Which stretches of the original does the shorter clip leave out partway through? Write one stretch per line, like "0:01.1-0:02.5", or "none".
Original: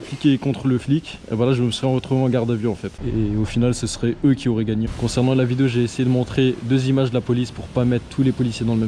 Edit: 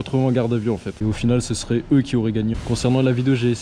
0:03.0-0:03.3